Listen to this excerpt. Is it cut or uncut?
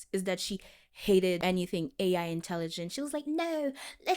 cut